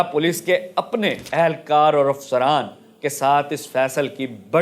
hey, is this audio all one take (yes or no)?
yes